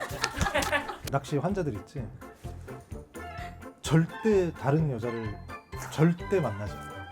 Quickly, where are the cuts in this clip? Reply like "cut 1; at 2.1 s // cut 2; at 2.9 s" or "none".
cut 1; at 1.0 s